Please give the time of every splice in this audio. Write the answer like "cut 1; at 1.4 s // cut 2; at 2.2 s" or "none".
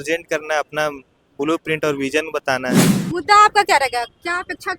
cut 1; at 2.9 s